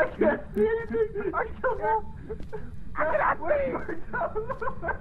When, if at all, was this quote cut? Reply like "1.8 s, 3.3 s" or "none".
none